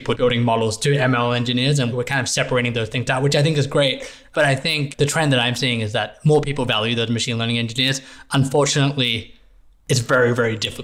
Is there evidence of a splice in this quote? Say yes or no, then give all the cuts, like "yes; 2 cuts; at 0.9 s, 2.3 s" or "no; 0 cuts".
no; 0 cuts